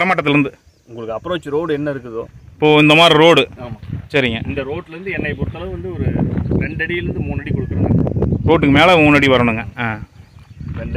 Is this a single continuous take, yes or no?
yes